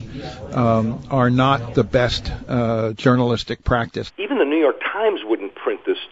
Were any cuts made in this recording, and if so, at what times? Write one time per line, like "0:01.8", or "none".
0:04.0